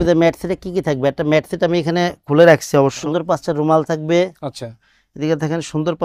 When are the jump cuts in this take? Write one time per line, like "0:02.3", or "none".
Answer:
0:03.0